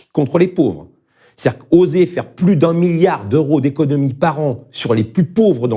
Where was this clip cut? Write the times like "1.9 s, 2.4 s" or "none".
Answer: none